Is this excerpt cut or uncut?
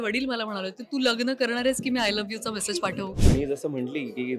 cut